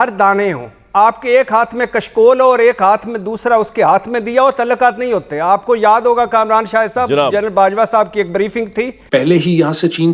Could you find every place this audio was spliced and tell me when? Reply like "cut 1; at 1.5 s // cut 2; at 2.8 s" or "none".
cut 1; at 9.0 s